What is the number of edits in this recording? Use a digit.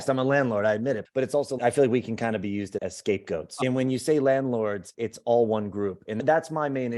2